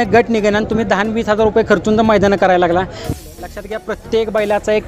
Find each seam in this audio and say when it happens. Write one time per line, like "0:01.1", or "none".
0:03.1